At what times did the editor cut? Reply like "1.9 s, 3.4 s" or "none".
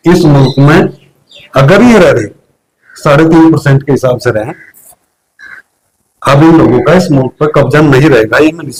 none